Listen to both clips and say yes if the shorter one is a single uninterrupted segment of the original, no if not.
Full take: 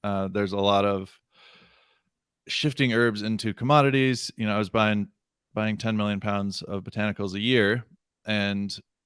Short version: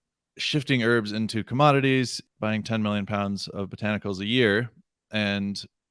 no